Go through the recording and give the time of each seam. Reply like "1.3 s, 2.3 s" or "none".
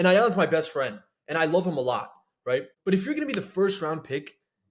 2.7 s